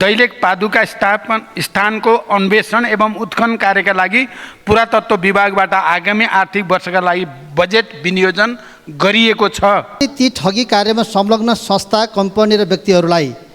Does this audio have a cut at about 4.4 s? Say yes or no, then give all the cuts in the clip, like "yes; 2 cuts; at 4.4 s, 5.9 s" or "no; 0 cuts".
no; 1 cut; at 10.0 s